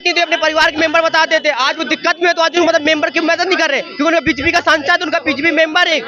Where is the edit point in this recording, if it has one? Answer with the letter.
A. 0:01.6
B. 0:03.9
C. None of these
C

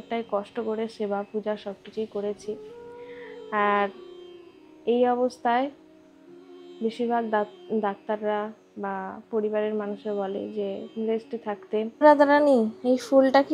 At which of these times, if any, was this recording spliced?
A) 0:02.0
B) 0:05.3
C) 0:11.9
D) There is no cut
C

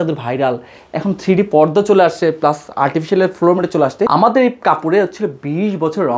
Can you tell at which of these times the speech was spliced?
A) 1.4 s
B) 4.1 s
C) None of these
B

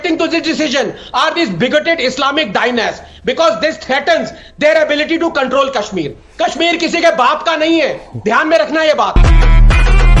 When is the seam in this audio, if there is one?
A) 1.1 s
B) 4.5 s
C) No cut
C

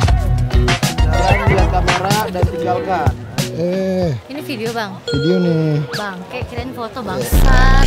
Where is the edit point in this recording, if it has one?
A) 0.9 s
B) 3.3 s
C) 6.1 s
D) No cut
D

